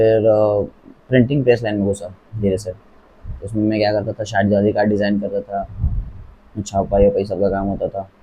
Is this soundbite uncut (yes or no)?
yes